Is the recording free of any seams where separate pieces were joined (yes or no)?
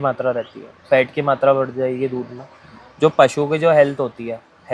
yes